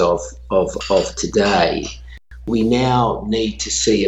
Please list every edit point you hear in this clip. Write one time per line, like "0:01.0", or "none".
0:02.5